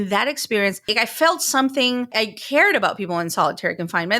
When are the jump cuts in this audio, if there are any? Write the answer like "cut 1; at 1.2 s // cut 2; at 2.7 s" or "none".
cut 1; at 0.9 s // cut 2; at 2.1 s

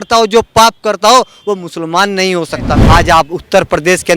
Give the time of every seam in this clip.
cut 1; at 2.7 s

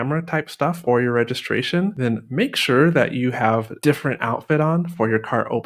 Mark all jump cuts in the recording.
cut 1; at 0.8 s // cut 2; at 2.0 s // cut 3; at 3.7 s

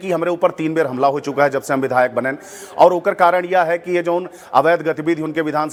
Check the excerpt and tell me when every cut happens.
none

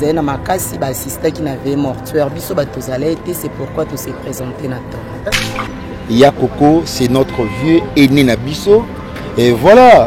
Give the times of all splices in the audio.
cut 1; at 5.4 s

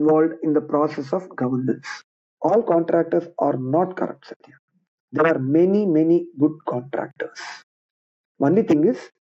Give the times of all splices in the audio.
cut 1; at 2.2 s

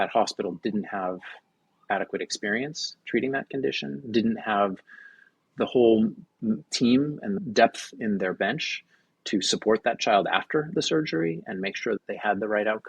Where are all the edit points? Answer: cut 1; at 7.4 s // cut 2; at 12.0 s

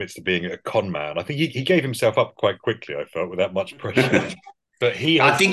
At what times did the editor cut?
none

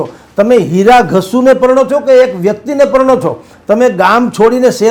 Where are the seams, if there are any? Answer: none

